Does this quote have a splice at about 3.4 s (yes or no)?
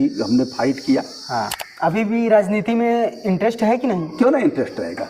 no